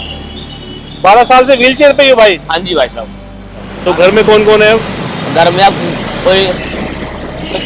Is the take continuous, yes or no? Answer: no